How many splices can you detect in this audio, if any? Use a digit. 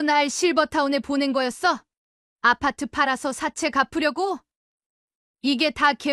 0